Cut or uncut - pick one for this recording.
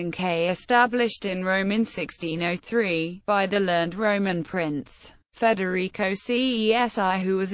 uncut